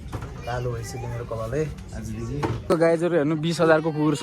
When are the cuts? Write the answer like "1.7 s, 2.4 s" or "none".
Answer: 2.6 s